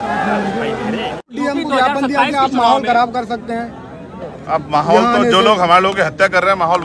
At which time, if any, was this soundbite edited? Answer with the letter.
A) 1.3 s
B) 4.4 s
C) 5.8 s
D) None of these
A